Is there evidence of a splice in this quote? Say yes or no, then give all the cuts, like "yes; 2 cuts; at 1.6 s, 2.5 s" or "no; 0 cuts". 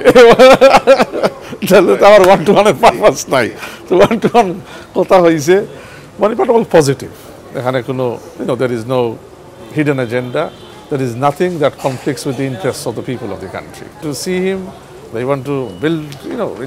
yes; 1 cut; at 14.0 s